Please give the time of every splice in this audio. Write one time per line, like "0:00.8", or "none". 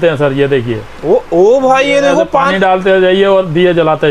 none